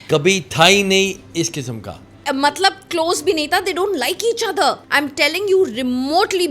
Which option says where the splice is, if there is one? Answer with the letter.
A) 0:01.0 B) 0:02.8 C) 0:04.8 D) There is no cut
C